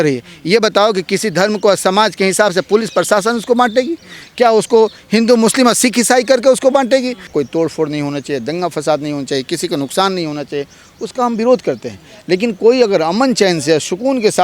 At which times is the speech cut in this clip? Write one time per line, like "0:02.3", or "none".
0:07.3